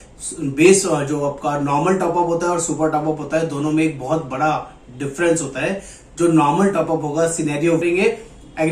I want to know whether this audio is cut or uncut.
cut